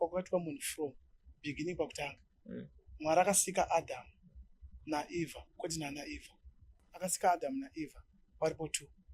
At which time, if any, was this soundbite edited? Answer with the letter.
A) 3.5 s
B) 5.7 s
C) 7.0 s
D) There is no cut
C